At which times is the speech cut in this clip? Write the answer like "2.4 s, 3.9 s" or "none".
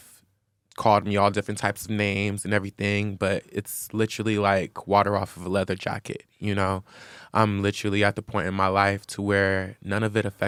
none